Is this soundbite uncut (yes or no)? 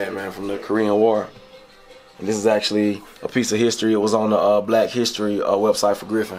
yes